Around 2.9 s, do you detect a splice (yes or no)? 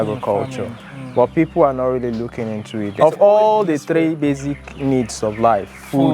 yes